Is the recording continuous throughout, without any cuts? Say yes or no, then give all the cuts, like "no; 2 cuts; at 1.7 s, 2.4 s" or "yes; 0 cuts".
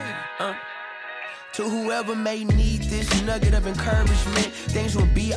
yes; 0 cuts